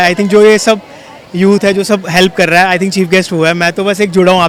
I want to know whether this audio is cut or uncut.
uncut